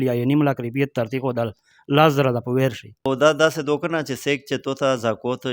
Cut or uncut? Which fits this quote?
cut